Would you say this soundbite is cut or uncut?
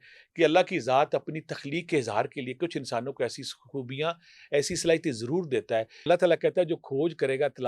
cut